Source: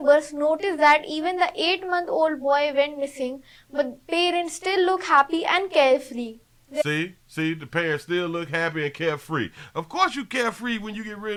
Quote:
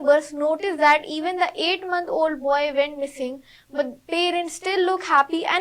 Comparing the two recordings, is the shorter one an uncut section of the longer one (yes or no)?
yes